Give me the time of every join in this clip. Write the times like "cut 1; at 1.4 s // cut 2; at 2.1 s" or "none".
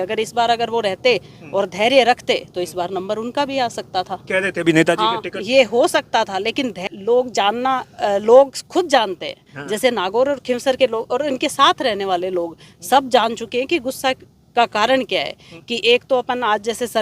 cut 1; at 6.8 s